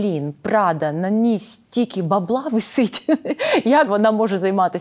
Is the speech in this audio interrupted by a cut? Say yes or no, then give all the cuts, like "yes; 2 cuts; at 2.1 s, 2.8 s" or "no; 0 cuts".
yes; 1 cut; at 3.9 s